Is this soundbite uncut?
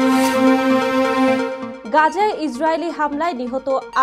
no; 1 cut; at 1.7 s

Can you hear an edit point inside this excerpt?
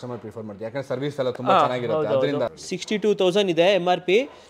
yes; 1 cut; at 2.6 s

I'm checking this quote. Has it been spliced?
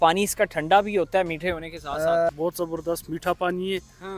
yes; 1 cut; at 2.3 s

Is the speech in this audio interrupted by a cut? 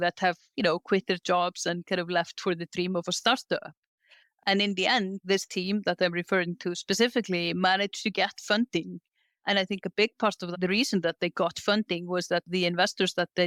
no; 0 cuts

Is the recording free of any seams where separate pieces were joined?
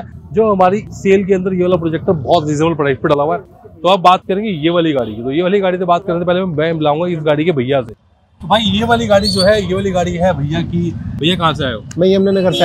yes; 0 cuts

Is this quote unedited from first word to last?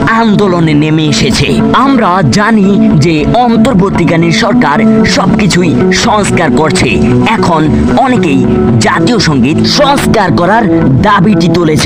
yes; 0 cuts

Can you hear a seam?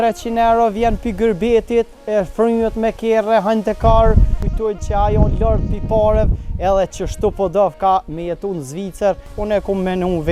yes; 2 cuts; at 4.5 s, 9.3 s

